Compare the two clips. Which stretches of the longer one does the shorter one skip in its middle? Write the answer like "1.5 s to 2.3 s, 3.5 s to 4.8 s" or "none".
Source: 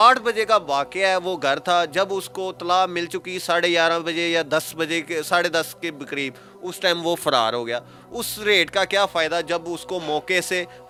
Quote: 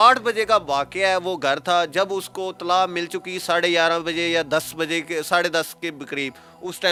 none